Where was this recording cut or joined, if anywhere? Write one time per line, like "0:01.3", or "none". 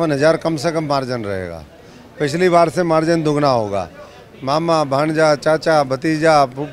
none